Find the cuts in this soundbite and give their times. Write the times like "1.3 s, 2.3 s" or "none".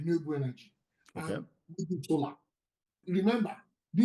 2.9 s